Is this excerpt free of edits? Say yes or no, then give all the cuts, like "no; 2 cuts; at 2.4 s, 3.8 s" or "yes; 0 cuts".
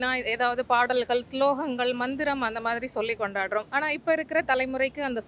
no; 1 cut; at 3.7 s